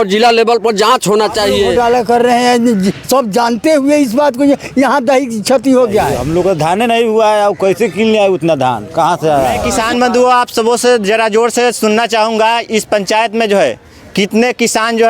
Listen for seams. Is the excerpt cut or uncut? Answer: cut